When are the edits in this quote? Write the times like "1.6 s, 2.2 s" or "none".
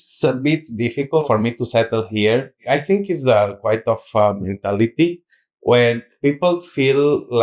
1.2 s, 2.6 s